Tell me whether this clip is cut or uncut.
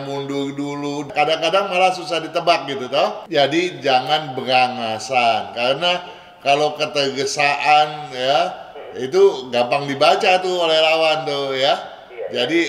cut